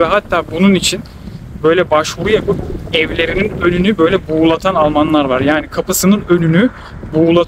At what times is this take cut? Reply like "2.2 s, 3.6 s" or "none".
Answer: none